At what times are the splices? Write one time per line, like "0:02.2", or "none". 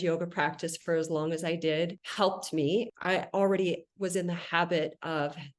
0:02.0
0:02.9